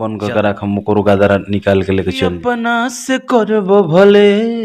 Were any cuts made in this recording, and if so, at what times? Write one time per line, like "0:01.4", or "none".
0:02.4